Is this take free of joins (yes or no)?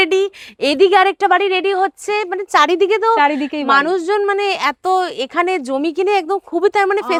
yes